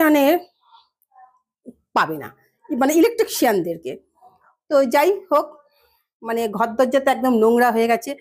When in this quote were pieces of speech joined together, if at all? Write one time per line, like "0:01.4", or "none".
none